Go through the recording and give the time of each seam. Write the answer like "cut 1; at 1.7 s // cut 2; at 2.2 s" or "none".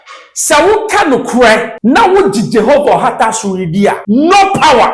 cut 1; at 1.7 s // cut 2; at 4.0 s